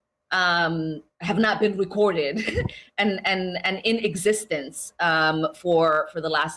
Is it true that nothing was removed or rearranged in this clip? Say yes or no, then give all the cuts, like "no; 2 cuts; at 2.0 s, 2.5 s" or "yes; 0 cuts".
no; 1 cut; at 3.3 s